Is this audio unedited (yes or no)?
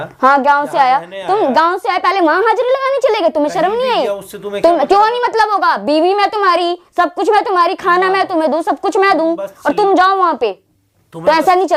yes